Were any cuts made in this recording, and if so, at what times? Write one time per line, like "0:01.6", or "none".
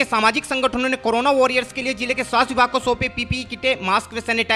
none